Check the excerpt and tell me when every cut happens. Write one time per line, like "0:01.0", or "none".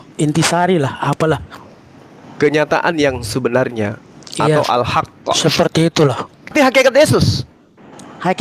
0:06.5